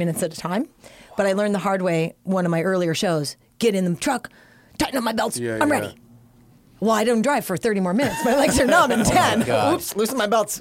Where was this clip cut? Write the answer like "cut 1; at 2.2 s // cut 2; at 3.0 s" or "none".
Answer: none